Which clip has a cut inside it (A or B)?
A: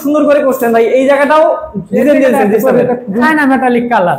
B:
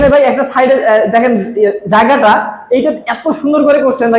A